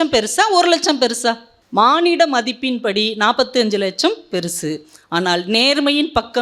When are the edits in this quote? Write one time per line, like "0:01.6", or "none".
0:01.5